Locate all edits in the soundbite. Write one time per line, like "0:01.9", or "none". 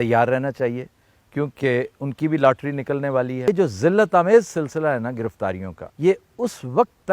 0:03.5